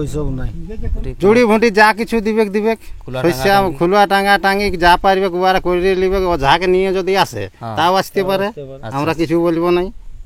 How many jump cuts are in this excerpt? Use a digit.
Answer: 1